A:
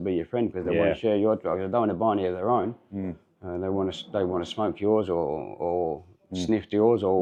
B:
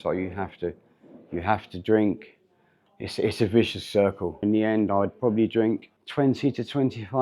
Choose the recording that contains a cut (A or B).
B